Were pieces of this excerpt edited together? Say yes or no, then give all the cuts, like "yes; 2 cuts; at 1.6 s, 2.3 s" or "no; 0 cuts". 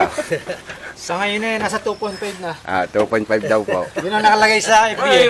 yes; 1 cut; at 2.9 s